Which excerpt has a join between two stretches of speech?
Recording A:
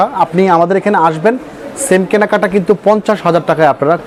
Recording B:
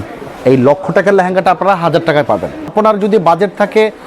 B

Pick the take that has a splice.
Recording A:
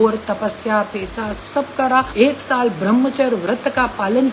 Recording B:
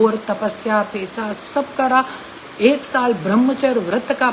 A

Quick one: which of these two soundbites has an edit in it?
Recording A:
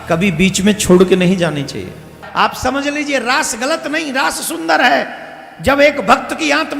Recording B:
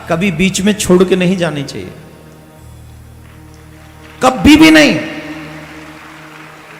A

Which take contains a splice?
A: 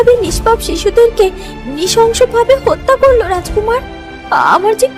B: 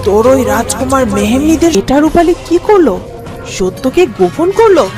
B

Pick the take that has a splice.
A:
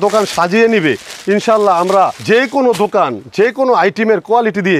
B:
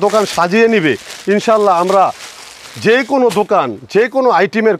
A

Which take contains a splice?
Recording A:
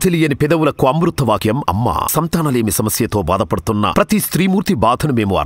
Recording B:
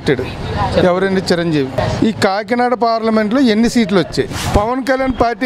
B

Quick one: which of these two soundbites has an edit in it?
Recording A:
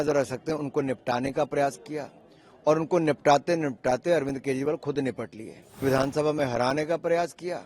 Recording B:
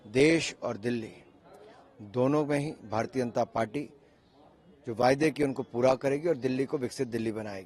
A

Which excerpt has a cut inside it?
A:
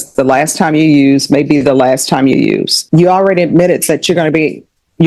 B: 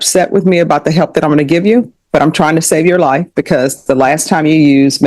A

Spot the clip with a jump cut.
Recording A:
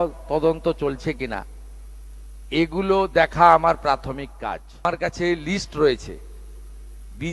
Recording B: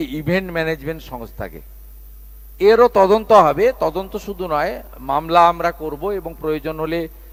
A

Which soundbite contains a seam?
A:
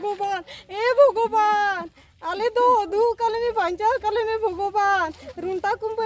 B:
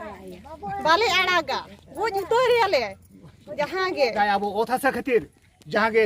B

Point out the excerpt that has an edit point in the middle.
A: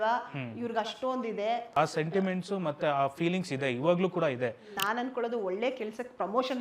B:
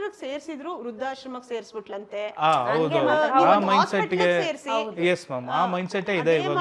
A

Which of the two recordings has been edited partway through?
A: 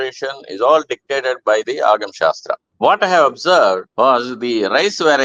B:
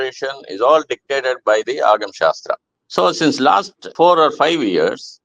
B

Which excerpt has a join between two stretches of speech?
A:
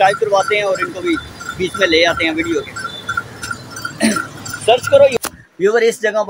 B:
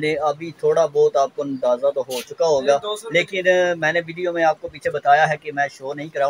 A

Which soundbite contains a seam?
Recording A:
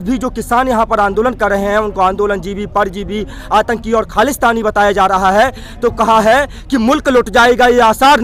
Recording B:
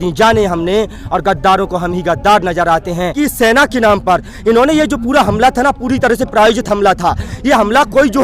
B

